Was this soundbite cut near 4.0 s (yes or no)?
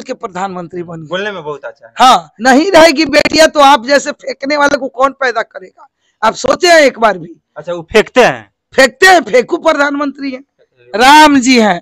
no